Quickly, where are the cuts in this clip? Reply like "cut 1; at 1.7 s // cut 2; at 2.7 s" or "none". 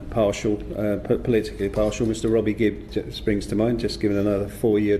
none